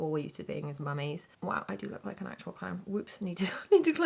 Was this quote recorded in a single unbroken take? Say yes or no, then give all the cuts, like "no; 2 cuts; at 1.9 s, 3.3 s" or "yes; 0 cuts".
yes; 0 cuts